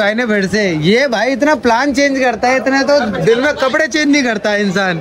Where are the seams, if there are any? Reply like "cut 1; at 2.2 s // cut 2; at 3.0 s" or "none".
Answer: none